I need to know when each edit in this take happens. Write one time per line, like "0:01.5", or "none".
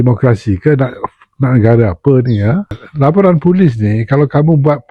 0:02.8